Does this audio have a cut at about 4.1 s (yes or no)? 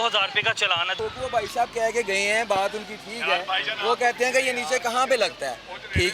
no